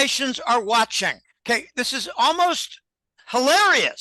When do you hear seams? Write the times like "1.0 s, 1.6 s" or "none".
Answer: 1.3 s